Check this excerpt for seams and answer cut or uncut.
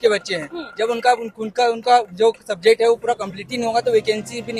uncut